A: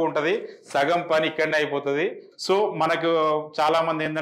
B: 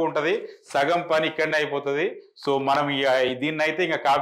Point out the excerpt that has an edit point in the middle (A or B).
A